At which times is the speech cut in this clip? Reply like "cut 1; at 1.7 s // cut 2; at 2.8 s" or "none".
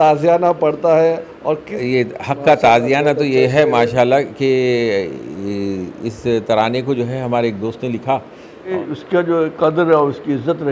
cut 1; at 1.7 s // cut 2; at 8.7 s